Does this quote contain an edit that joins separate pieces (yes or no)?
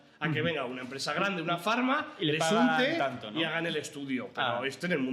no